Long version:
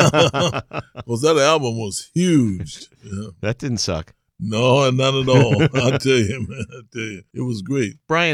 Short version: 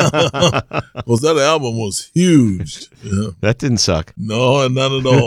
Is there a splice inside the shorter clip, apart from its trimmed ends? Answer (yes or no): yes